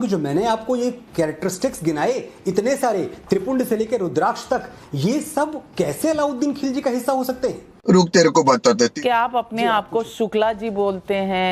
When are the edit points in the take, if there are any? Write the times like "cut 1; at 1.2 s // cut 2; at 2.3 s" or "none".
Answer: cut 1; at 9.0 s